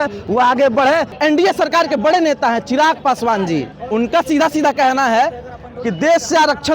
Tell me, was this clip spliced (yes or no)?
yes